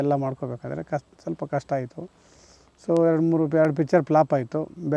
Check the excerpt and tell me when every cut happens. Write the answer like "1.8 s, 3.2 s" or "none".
none